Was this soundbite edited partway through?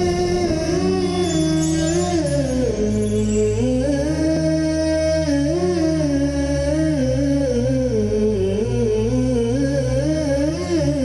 yes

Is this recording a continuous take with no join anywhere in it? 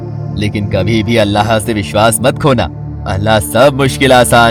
yes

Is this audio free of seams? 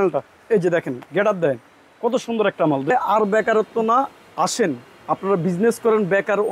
no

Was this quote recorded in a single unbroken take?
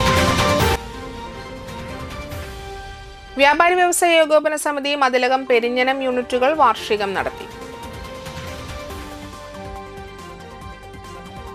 yes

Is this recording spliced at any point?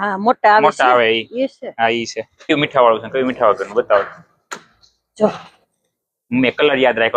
yes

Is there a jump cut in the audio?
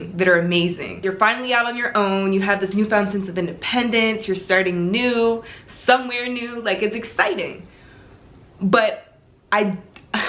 yes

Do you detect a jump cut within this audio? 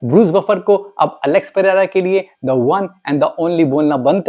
no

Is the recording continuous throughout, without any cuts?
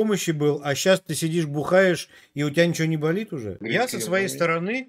no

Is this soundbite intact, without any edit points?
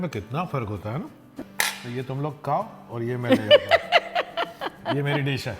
no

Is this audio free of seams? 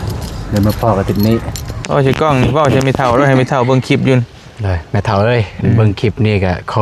no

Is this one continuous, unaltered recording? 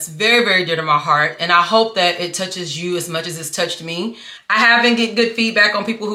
yes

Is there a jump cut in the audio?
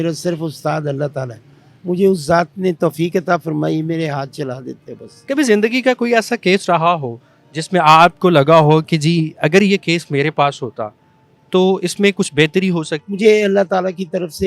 yes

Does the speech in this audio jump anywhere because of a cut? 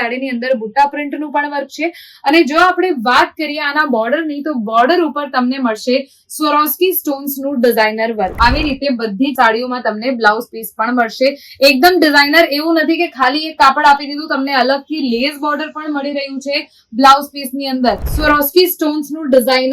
yes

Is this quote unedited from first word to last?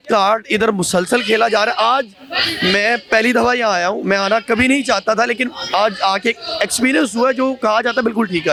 yes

